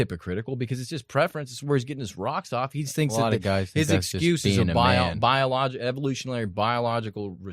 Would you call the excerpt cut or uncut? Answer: uncut